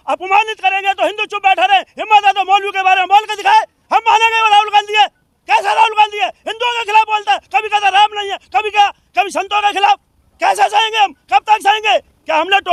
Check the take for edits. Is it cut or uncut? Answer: uncut